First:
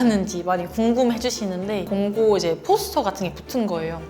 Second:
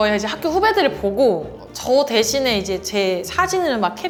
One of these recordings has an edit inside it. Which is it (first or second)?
first